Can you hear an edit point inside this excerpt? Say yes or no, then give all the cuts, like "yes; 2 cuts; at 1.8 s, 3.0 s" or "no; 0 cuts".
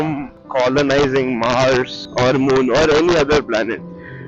no; 0 cuts